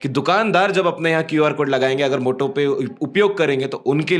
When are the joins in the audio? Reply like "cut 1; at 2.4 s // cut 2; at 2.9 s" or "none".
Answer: none